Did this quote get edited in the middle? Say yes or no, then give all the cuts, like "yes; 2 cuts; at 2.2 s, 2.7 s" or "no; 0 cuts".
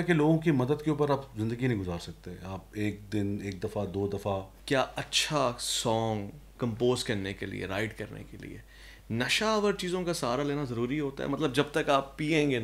yes; 2 cuts; at 4.5 s, 6.5 s